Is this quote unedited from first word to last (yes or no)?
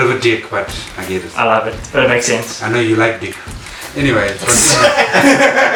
yes